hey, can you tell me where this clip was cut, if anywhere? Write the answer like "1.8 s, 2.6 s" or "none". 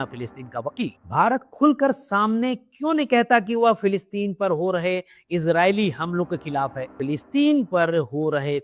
1.0 s, 6.9 s